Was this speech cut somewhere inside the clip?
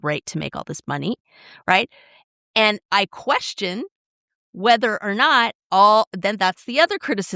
no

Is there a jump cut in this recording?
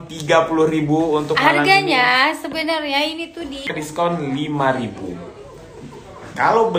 yes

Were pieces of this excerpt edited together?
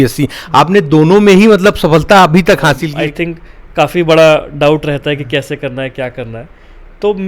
yes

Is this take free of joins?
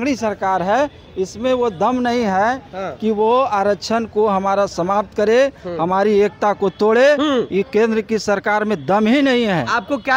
yes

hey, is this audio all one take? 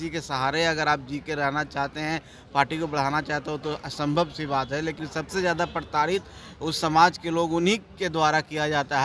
no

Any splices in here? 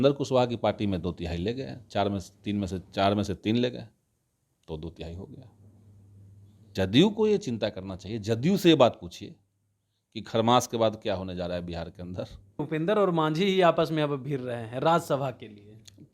yes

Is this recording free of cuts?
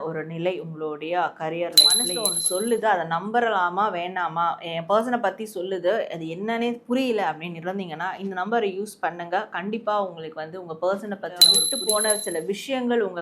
no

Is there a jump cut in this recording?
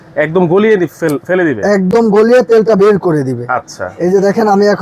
no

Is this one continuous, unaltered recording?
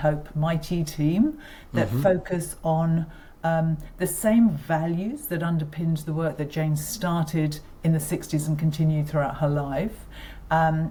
yes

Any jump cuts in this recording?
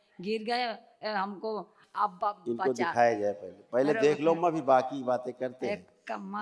no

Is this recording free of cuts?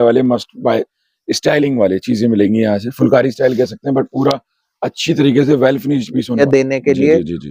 no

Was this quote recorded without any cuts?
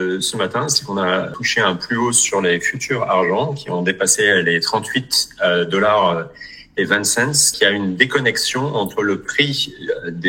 no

